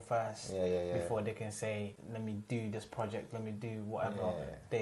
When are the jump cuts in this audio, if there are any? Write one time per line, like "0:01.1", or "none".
0:02.0

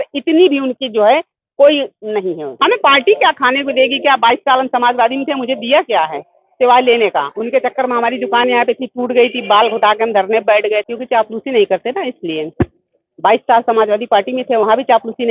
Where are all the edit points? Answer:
0:02.4
0:10.8

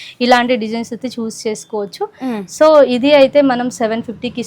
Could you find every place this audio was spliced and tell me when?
none

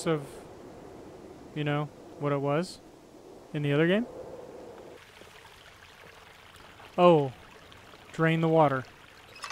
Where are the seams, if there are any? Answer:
0:05.0

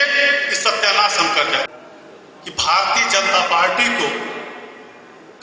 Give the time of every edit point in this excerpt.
0:01.7

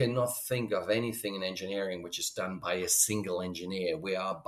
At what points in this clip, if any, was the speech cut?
none

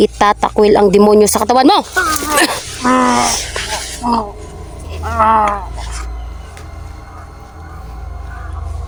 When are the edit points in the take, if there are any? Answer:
none

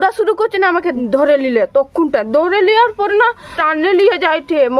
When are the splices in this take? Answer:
0:00.9
0:03.5

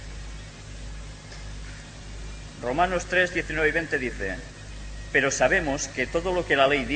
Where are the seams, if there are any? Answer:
none

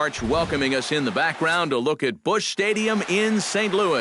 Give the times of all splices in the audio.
none

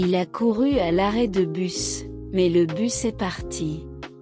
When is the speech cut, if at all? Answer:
0:02.2

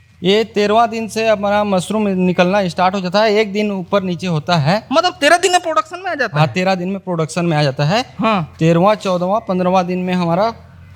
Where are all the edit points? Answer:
none

